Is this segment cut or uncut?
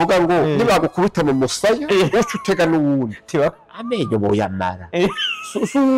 uncut